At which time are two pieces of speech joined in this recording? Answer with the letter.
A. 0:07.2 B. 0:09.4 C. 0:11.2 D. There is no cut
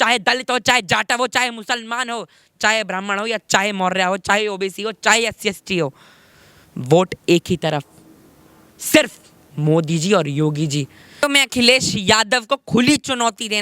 C